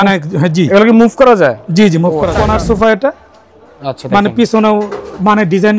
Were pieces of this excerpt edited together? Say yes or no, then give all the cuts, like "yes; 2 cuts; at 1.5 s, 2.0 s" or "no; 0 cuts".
yes; 1 cut; at 2.3 s